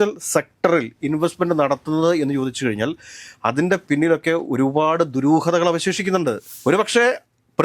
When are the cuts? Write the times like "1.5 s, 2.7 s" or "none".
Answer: 6.5 s